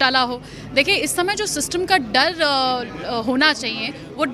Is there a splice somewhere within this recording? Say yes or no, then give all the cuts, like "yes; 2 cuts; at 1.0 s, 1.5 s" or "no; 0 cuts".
no; 0 cuts